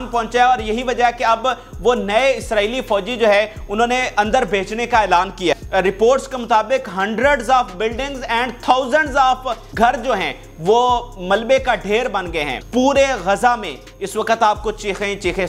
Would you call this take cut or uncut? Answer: cut